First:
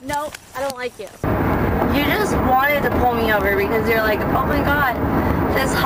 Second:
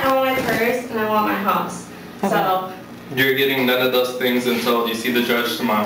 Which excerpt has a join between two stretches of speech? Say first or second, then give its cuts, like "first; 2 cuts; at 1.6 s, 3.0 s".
first; 1 cut; at 1.4 s